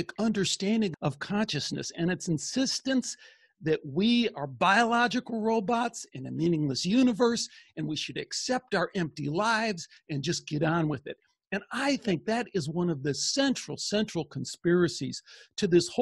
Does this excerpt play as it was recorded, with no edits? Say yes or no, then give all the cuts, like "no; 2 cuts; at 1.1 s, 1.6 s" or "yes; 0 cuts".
yes; 0 cuts